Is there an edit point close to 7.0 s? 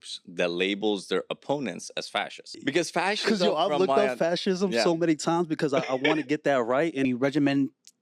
yes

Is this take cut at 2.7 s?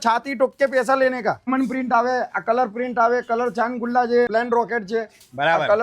no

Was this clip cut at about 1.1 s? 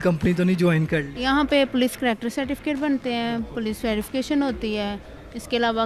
yes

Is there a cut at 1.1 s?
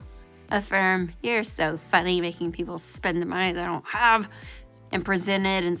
yes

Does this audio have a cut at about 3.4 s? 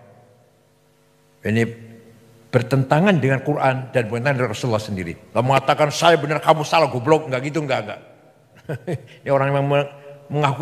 no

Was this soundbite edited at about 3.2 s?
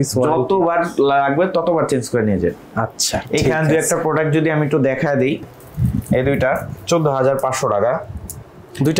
no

